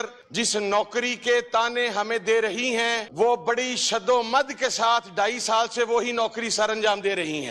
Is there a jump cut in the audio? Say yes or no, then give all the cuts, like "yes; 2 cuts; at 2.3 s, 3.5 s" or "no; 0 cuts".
yes; 1 cut; at 3.1 s